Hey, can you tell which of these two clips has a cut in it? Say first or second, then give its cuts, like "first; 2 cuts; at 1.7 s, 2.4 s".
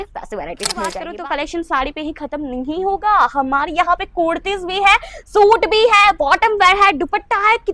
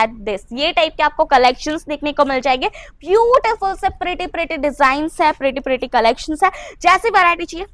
first; 1 cut; at 1.1 s